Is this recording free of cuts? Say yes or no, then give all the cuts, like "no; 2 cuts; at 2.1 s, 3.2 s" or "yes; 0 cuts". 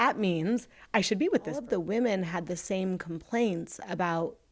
no; 1 cut; at 1.6 s